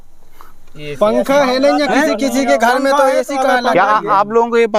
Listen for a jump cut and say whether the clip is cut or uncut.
uncut